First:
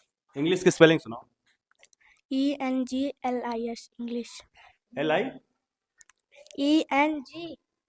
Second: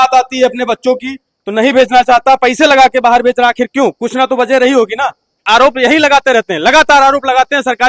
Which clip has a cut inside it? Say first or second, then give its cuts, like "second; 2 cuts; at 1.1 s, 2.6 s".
second; 1 cut; at 5.4 s